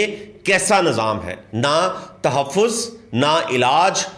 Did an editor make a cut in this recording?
no; 0 cuts

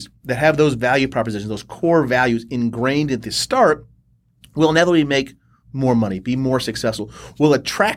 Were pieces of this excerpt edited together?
no; 0 cuts

